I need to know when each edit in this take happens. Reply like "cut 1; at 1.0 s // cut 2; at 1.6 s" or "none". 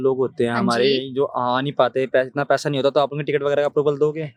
none